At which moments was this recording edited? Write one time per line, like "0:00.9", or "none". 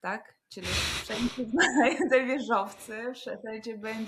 none